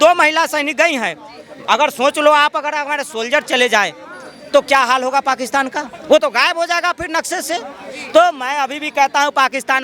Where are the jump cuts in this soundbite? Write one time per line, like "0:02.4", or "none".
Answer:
none